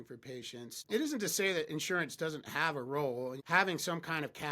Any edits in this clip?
yes; 2 cuts; at 0.8 s, 3.4 s

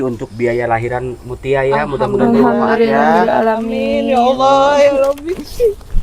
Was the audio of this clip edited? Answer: no; 0 cuts

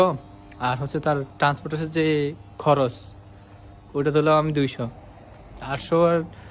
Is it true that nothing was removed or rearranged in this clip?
yes; 0 cuts

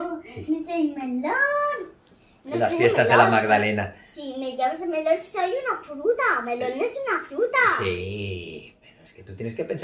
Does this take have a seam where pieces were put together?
no; 0 cuts

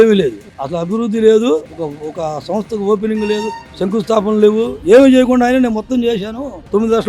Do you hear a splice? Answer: yes; 1 cut; at 4.8 s

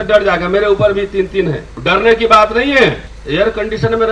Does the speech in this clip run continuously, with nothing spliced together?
no; 2 cuts; at 1.7 s, 3.1 s

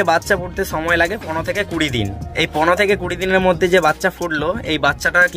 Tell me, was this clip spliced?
no; 0 cuts

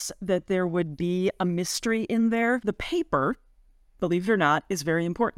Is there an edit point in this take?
yes; 1 cut; at 2.6 s

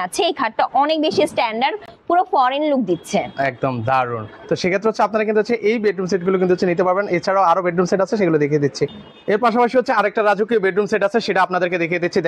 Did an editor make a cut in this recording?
no; 0 cuts

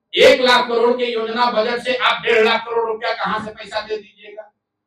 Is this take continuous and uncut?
yes; 0 cuts

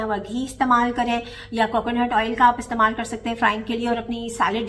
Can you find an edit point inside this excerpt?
no; 0 cuts

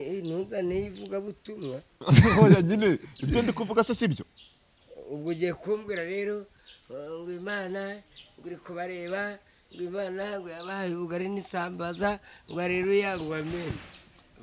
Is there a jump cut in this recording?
no; 0 cuts

